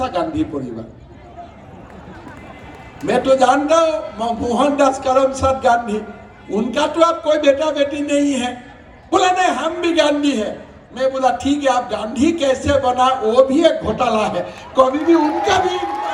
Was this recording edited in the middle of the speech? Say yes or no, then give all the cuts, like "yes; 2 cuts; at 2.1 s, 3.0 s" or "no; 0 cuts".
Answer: no; 0 cuts